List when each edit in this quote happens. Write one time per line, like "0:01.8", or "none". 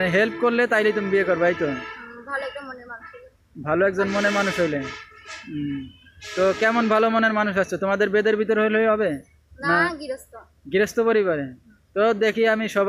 none